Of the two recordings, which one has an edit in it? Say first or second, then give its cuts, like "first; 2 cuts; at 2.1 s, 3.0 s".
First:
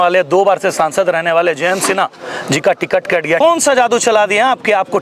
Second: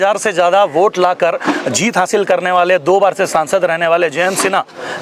first; 1 cut; at 3.4 s